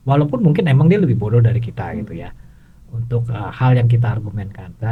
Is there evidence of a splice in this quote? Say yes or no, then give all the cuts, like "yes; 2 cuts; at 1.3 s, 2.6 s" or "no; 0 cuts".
no; 0 cuts